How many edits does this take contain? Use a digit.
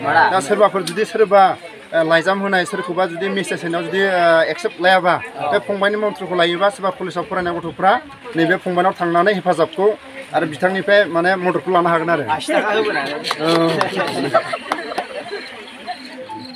0